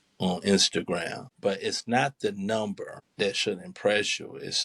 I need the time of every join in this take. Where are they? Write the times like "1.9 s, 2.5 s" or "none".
1.2 s, 3.0 s